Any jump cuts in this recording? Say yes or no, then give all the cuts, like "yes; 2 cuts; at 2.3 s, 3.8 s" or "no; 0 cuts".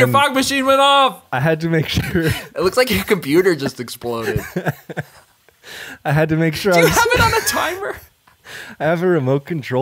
yes; 1 cut; at 1.2 s